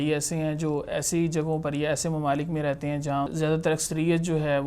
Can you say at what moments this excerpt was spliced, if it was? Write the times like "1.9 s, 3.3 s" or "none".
3.3 s